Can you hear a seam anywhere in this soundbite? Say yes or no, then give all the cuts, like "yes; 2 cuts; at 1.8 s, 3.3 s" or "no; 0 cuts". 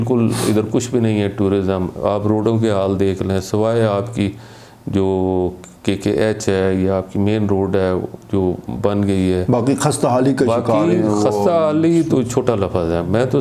no; 0 cuts